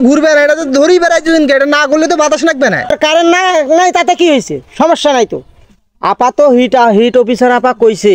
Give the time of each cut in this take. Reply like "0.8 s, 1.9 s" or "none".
2.9 s